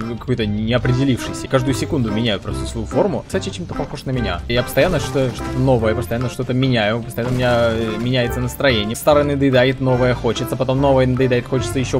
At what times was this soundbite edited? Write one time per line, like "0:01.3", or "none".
0:01.5
0:03.3
0:04.5
0:09.0